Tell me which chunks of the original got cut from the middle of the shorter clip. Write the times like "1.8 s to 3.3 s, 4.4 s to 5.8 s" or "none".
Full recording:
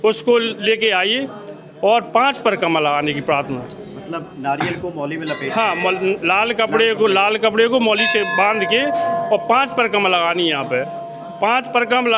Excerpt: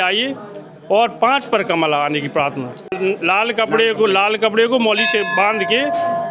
3.9 s to 6.0 s